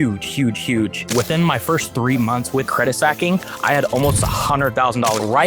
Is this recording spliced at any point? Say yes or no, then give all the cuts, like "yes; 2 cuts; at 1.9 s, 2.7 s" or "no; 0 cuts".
yes; 1 cut; at 1.0 s